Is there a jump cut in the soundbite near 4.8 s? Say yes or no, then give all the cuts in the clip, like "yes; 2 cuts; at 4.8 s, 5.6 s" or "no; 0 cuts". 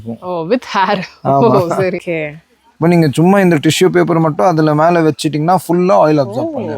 no; 1 cut; at 2.0 s